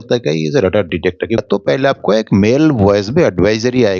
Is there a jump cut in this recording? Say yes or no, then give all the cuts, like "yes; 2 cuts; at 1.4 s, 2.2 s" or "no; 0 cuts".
yes; 1 cut; at 1.4 s